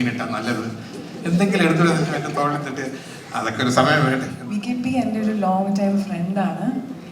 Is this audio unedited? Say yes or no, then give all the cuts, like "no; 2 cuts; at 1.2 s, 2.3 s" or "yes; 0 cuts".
no; 1 cut; at 4.3 s